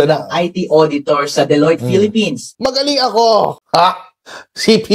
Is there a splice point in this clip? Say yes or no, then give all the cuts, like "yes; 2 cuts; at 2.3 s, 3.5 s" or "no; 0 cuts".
yes; 1 cut; at 2.6 s